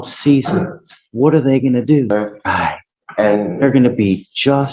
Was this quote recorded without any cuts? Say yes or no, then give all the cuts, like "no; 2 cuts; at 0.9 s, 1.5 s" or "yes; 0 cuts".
no; 1 cut; at 2.1 s